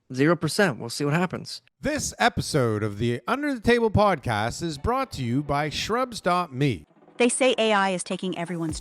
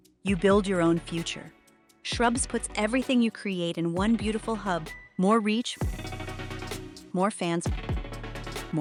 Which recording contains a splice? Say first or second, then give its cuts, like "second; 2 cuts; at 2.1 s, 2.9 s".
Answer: first; 1 cut; at 1.6 s